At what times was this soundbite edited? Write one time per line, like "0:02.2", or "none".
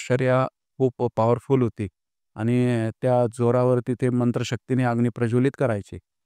none

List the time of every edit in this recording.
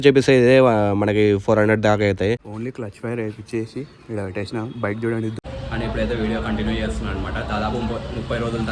0:02.4
0:05.3

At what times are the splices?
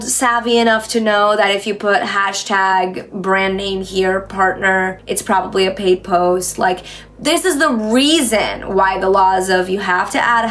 0:05.0

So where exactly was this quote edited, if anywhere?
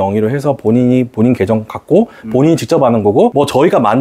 none

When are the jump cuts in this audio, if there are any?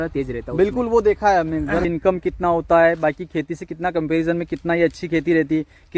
0:01.9

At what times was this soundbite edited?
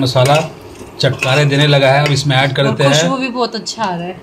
none

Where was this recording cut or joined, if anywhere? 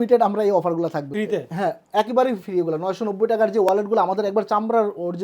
0:01.1

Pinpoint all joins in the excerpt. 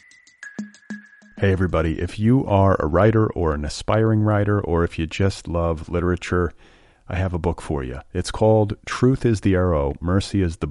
0:00.9

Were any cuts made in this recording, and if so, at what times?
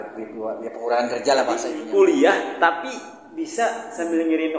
0:01.8

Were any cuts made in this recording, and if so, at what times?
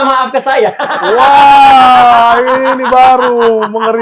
none

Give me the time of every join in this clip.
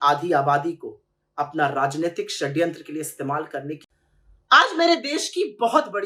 0:03.8

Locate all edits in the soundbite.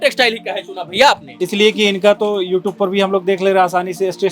0:01.3

